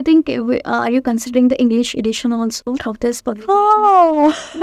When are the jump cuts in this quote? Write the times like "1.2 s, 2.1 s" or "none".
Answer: none